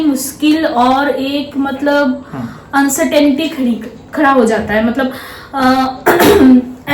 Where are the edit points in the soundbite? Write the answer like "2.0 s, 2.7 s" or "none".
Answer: none